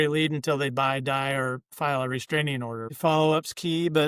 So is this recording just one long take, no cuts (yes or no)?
no